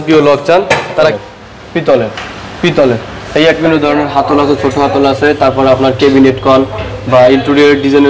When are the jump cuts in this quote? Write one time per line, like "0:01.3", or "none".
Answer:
0:01.1
0:03.6

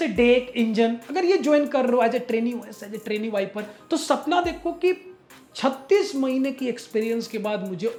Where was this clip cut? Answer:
none

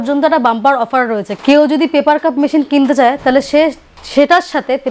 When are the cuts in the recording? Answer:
0:01.4

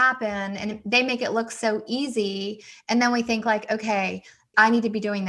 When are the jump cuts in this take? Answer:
none

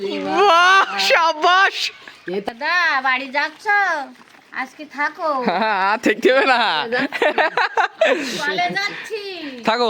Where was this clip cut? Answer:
0:02.4

